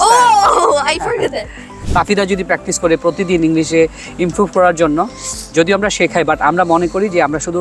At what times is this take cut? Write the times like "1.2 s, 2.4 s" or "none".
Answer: 1.7 s